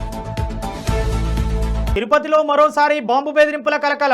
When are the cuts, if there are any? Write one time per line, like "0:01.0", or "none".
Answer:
0:01.9